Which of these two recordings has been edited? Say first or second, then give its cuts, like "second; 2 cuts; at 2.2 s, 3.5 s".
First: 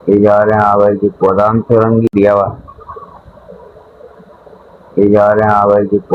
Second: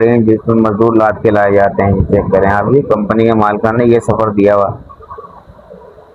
first; 1 cut; at 2.1 s